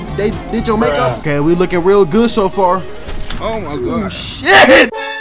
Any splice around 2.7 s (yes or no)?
no